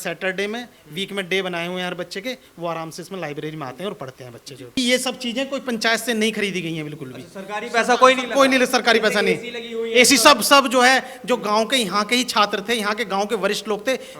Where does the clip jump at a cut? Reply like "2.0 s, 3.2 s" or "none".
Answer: 4.8 s

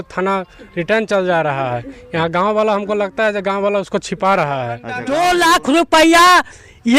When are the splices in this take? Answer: 4.9 s

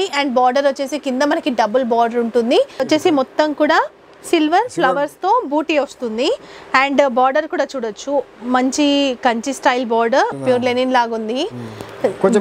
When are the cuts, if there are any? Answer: 2.8 s, 10.4 s

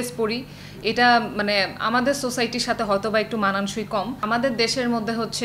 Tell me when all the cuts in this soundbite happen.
4.2 s

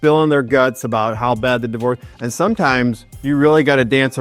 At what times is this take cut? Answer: 2.1 s

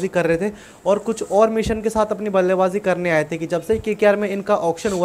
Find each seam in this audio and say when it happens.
none

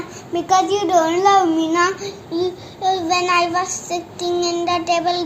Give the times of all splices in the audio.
none

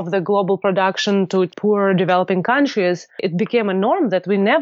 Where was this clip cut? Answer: 1.5 s, 3.2 s

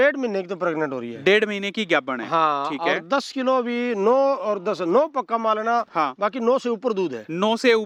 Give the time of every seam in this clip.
none

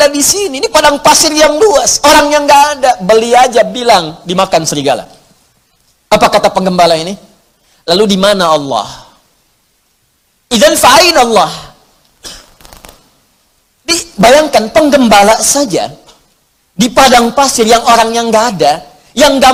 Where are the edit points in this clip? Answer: none

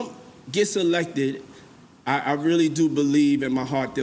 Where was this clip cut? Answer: none

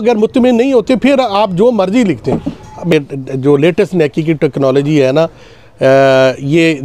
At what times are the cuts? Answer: 2.9 s

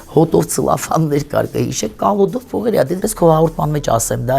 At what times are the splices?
3.1 s

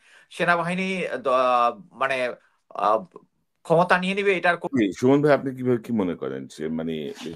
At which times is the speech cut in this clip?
4.6 s

